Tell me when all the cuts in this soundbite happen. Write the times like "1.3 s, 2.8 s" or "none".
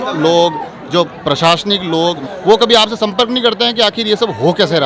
2.2 s